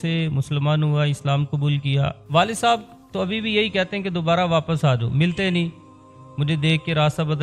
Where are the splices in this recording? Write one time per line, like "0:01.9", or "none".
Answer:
0:02.2